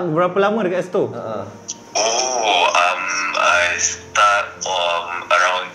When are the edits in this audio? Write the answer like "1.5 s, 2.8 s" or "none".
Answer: none